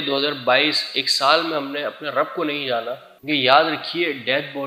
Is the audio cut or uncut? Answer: cut